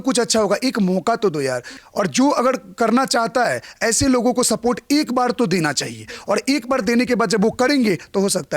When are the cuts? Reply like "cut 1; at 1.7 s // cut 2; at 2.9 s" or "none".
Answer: cut 1; at 1.7 s